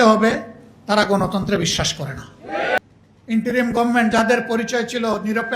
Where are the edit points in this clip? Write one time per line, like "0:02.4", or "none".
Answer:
0:02.8